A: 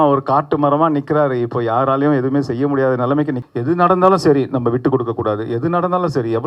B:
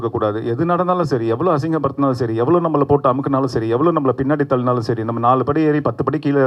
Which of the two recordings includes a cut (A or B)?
A